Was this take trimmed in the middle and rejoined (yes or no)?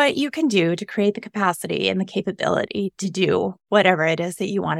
no